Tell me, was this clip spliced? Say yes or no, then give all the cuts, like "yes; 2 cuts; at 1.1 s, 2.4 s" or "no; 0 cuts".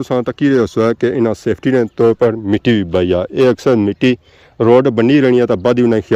no; 0 cuts